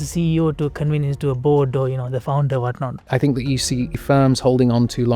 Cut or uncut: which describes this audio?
cut